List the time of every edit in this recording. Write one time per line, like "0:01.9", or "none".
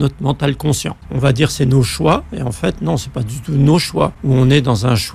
0:01.0
0:04.2